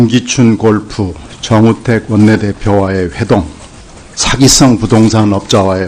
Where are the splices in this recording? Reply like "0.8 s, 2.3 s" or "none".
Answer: 2.0 s